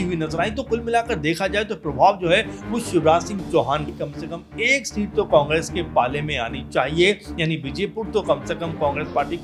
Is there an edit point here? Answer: yes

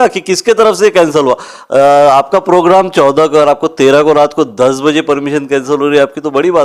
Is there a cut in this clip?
no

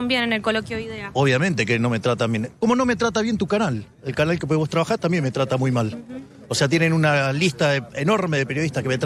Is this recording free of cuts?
yes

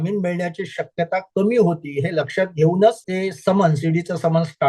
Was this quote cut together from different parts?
yes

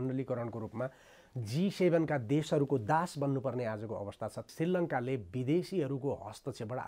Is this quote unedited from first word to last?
no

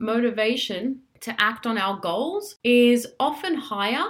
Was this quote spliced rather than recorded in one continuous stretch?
no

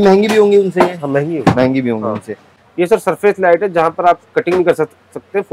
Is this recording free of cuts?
no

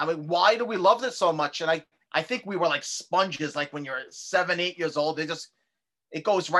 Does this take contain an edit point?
yes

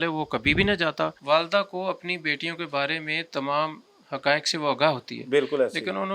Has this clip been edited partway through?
yes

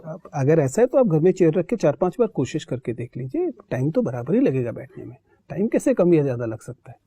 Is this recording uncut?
yes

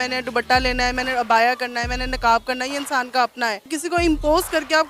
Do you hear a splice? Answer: yes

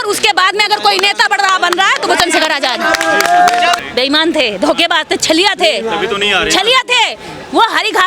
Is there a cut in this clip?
yes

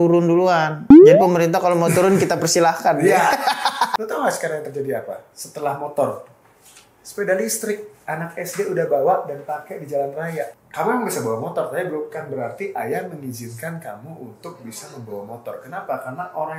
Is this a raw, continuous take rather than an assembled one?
no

